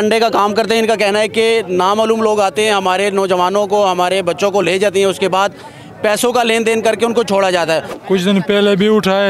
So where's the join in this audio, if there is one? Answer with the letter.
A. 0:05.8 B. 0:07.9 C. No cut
B